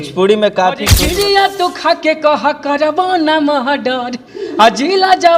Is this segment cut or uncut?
cut